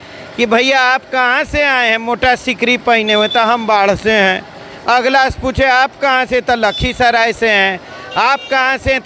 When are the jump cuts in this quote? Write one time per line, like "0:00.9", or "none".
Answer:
none